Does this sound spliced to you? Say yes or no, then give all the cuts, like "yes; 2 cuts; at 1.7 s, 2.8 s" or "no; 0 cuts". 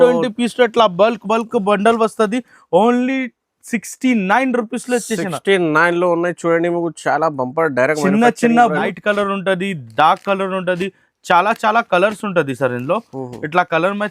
yes; 1 cut; at 8.9 s